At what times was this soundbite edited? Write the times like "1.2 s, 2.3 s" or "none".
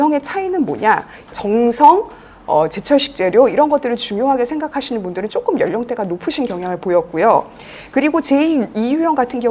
1.3 s